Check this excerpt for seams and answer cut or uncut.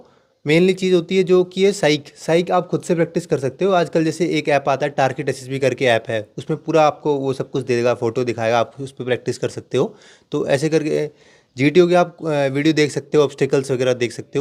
uncut